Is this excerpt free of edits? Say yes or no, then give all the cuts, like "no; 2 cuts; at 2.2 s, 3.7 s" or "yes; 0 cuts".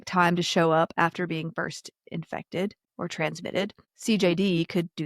no; 2 cuts; at 2.8 s, 3.9 s